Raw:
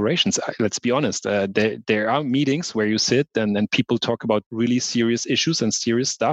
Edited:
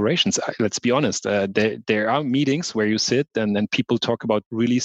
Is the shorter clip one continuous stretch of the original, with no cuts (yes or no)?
yes